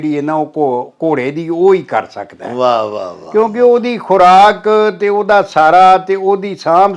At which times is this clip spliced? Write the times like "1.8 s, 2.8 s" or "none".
none